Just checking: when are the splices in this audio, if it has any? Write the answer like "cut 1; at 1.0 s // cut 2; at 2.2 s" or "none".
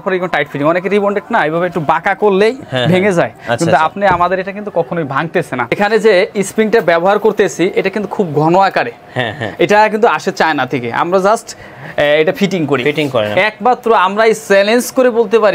cut 1; at 5.7 s // cut 2; at 13.3 s